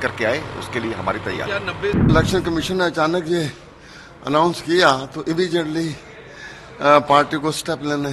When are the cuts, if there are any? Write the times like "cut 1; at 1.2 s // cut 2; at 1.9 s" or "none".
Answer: cut 1; at 2.1 s

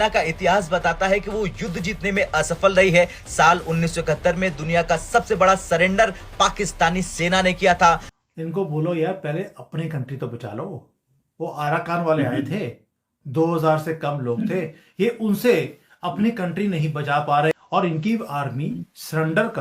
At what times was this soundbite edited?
cut 1; at 8.0 s // cut 2; at 17.5 s

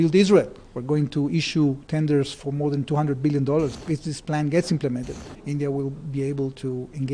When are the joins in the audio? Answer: cut 1; at 3.8 s // cut 2; at 5.2 s

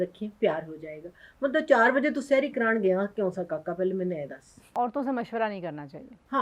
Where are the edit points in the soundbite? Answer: cut 1; at 4.7 s

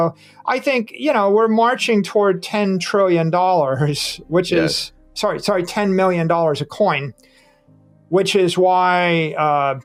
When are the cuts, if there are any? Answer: none

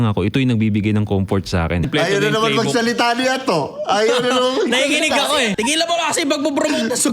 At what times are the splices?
cut 1; at 1.9 s // cut 2; at 5.5 s

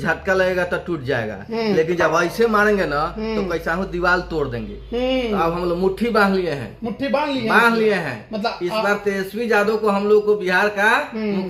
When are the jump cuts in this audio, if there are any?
none

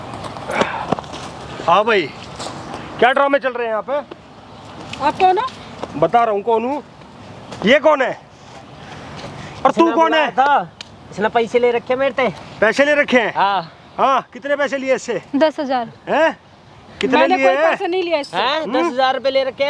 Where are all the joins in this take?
none

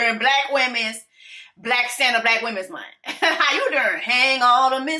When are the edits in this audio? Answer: none

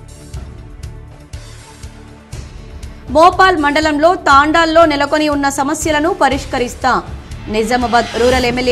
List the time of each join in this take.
cut 1; at 1.0 s

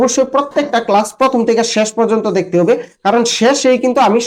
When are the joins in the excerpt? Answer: none

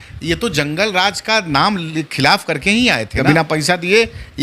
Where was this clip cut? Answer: cut 1; at 3.2 s

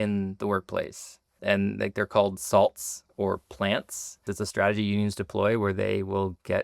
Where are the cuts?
cut 1; at 1.4 s // cut 2; at 4.3 s

